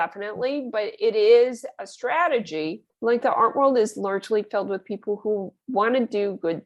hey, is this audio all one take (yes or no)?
no